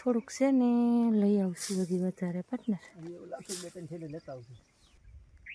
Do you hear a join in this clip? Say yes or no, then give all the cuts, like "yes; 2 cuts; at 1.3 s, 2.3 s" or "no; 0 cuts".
no; 0 cuts